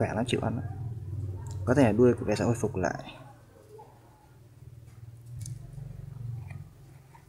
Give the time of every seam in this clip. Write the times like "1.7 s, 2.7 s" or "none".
4.3 s